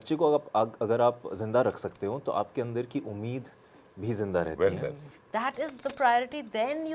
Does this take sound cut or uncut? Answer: cut